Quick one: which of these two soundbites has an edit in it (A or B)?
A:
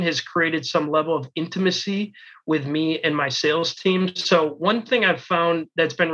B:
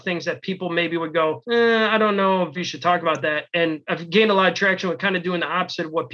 B